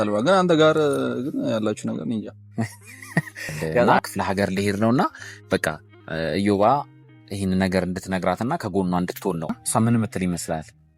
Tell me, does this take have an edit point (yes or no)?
yes